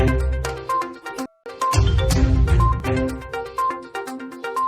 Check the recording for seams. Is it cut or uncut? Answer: cut